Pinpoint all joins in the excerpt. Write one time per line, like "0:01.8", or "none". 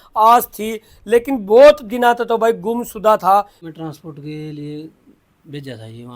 0:03.6

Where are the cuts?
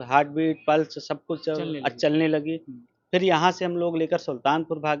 none

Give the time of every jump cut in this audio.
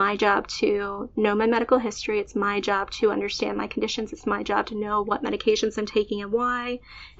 none

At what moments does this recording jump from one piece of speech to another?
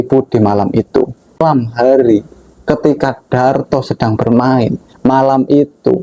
0:01.4

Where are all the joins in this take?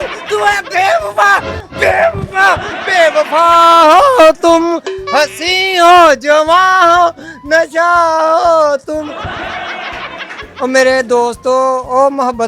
0:10.5

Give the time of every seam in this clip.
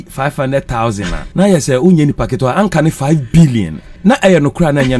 0:01.2
0:03.8

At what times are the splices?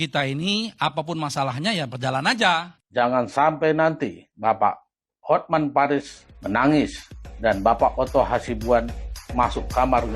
0:02.7

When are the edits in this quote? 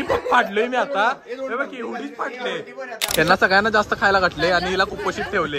0:03.0

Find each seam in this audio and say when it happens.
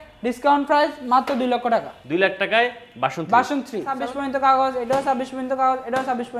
0:04.0

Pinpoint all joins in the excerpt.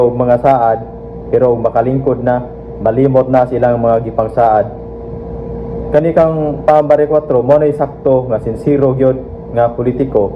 none

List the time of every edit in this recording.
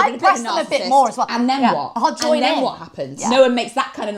0:01.3
0:03.1

